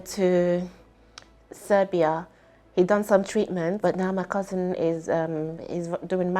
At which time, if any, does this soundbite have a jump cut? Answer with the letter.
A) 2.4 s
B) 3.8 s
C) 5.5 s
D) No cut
B